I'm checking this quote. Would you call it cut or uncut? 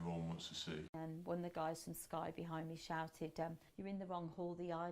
cut